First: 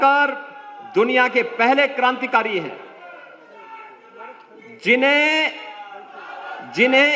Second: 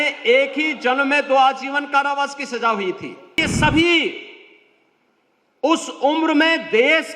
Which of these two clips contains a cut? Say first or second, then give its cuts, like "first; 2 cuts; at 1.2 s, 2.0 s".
second; 1 cut; at 3.4 s